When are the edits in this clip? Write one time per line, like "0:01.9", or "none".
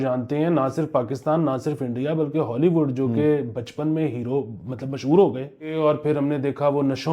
0:05.7